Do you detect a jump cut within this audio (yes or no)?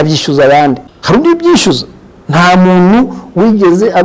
yes